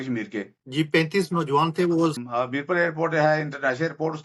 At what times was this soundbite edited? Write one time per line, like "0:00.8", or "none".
0:02.1